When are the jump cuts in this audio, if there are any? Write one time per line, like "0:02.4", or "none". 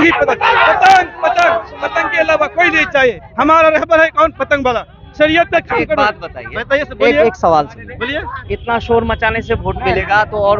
none